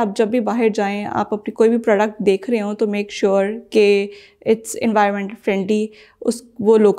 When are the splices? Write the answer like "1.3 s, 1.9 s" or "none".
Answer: none